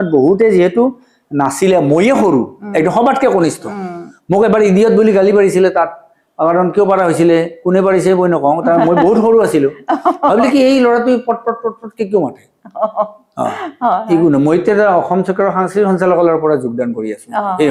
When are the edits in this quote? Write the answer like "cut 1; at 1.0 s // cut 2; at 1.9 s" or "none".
none